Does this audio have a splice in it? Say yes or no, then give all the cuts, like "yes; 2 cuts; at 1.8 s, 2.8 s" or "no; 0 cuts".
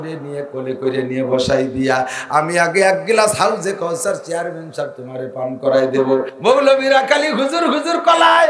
yes; 1 cut; at 6.3 s